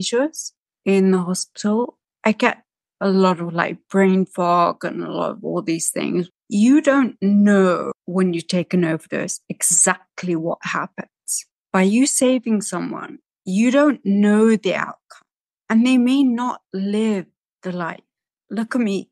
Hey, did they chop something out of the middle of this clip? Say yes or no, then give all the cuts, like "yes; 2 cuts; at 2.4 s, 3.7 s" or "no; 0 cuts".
yes; 3 cuts; at 6.3 s, 7.9 s, 11.6 s